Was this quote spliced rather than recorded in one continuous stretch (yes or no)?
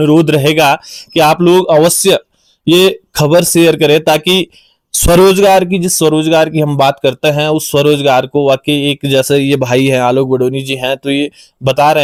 no